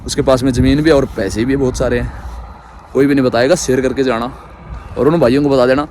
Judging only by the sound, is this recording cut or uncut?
uncut